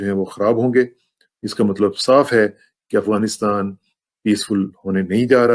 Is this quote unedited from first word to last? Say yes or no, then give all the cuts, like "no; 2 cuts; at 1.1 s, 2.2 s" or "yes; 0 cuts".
yes; 0 cuts